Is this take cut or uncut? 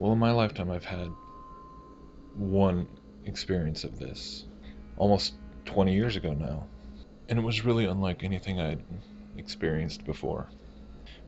uncut